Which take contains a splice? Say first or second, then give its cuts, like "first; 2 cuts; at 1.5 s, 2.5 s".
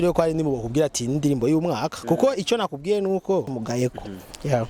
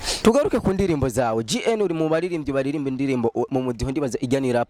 first; 1 cut; at 3.5 s